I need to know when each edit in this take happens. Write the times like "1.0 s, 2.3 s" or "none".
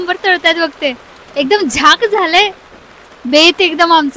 none